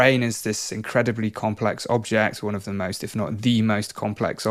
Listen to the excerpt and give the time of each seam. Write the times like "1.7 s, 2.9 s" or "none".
none